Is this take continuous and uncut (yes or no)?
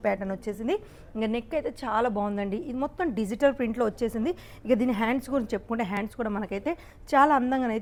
yes